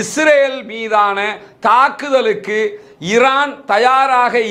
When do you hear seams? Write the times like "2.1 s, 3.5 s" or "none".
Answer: none